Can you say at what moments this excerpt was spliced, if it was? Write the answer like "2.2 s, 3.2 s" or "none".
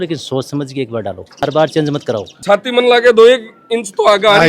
1.4 s, 2.3 s